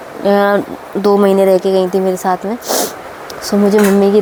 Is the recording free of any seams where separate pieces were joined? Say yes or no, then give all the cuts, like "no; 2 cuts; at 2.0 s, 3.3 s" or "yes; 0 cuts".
yes; 0 cuts